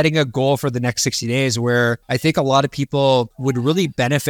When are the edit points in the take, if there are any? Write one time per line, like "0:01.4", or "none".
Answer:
0:02.0
0:03.3